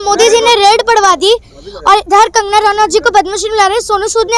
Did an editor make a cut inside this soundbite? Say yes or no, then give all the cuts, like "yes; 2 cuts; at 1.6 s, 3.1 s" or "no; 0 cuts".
no; 0 cuts